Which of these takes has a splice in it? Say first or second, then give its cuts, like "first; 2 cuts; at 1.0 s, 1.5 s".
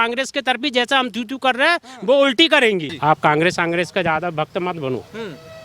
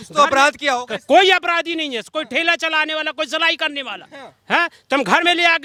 first; 1 cut; at 2.9 s